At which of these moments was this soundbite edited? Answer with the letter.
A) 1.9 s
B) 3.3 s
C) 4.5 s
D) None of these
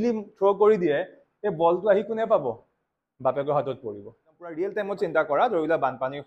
C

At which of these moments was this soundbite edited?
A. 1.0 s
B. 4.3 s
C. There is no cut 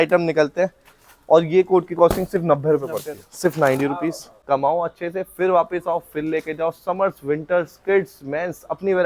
B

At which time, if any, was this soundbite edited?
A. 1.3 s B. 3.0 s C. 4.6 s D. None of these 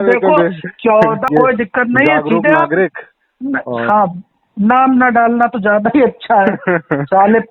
A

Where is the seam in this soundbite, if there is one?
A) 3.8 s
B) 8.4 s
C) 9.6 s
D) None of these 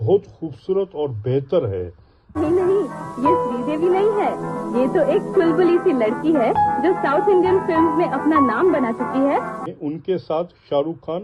C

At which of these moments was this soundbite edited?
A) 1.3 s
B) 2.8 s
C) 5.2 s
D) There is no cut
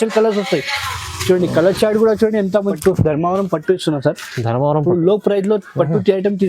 B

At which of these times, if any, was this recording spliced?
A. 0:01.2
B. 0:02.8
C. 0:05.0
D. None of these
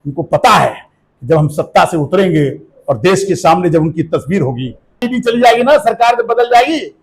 C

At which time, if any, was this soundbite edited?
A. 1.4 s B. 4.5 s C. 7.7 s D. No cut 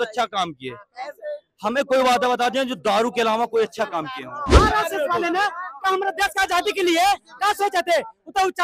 B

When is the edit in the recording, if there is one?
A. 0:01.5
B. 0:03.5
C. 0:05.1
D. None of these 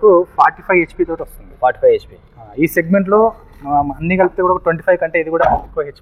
D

